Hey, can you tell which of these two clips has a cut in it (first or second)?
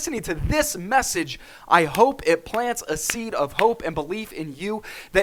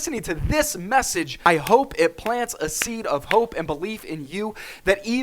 second